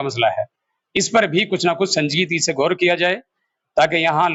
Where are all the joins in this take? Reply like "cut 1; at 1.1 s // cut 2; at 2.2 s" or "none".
none